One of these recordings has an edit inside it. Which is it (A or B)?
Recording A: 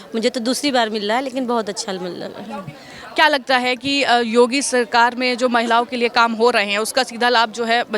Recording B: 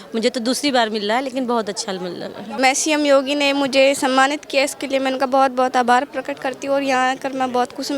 B